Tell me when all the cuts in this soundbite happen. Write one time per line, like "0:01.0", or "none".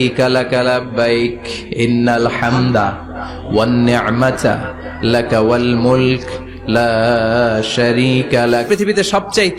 0:08.7